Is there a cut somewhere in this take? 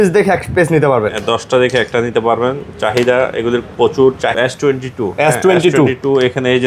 yes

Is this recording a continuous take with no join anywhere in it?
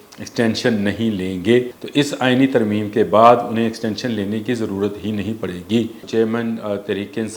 no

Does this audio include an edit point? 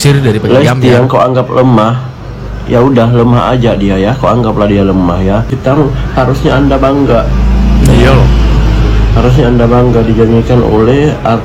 yes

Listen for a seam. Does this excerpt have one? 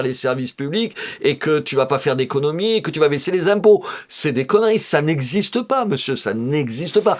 no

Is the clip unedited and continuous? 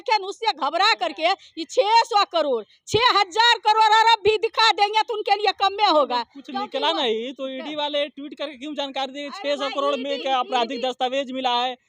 yes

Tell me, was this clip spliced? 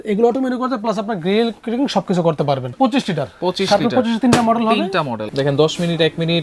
yes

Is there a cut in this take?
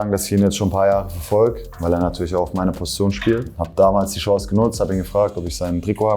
no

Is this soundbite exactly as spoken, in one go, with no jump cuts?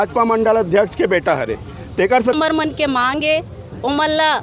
no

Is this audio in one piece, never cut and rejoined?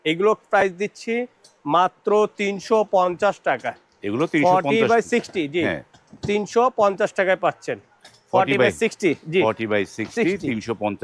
yes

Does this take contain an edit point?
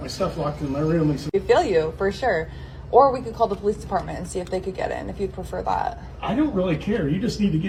no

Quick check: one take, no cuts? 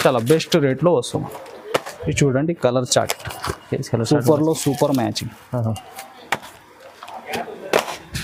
yes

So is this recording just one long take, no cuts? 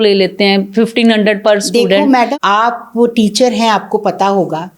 no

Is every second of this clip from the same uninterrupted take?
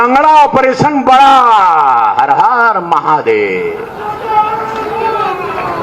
yes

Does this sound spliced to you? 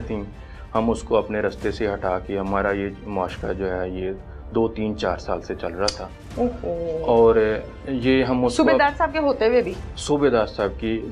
no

